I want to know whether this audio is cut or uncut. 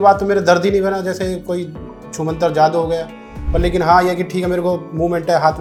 uncut